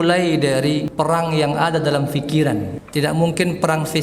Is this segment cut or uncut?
cut